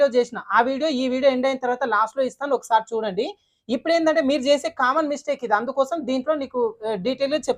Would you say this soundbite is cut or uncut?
uncut